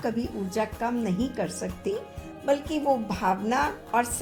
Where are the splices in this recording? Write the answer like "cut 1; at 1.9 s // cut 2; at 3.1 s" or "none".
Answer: none